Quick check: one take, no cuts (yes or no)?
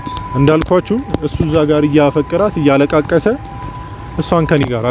yes